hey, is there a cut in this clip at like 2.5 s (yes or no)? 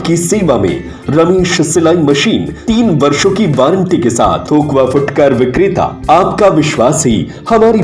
yes